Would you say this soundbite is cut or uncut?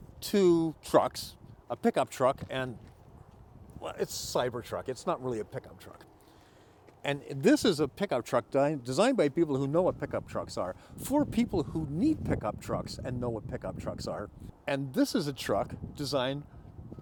uncut